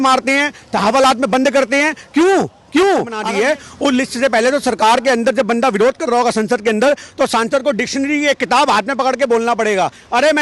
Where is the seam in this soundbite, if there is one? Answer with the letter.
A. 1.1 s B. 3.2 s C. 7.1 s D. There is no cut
B